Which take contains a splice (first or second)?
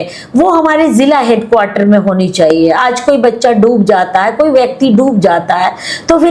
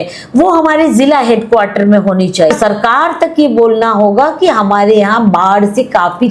second